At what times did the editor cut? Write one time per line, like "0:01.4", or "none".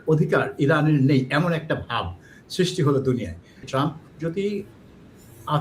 0:03.6

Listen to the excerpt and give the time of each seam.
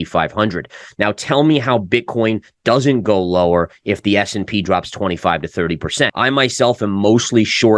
0:06.2

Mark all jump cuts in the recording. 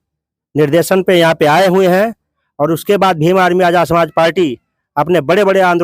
none

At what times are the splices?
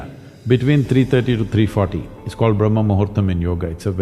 none

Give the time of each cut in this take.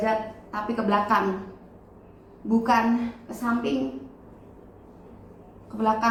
none

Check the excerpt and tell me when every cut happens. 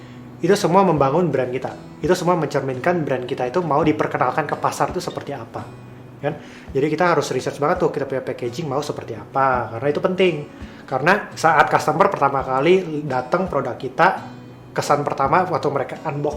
0:03.9
0:11.3

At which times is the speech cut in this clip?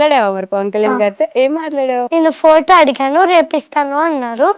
0:02.1

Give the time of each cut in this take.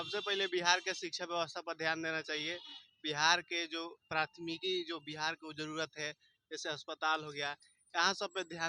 none

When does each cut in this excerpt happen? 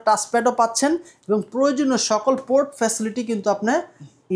none

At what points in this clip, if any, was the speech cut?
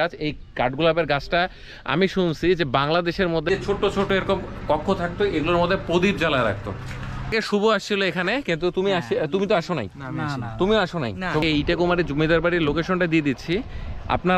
0:03.5
0:07.3
0:11.4

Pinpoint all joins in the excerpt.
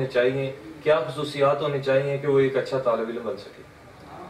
none

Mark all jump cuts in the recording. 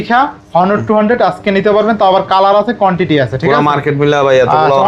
none

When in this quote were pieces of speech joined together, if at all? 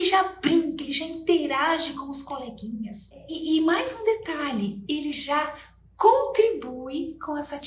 0:03.3

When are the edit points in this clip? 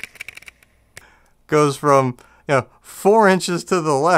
0:01.0

